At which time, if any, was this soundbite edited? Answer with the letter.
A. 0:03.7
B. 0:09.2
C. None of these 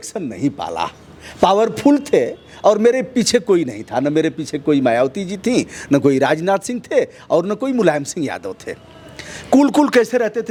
C